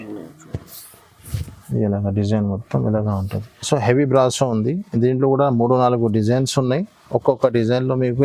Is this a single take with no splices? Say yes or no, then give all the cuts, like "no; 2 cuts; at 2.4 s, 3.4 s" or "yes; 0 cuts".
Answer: no; 1 cut; at 3.6 s